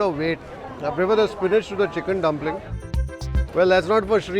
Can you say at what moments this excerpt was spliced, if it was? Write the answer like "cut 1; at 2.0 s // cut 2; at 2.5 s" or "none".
cut 1; at 2.7 s